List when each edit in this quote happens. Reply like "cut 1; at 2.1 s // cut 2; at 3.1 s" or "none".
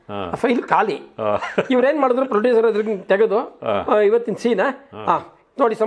none